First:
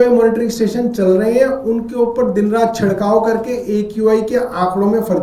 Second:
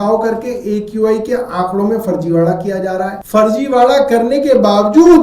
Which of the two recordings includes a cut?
second; 1 cut; at 3.2 s

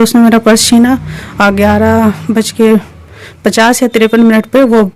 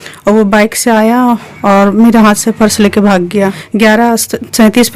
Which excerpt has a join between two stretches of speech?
second; 1 cut; at 3.6 s

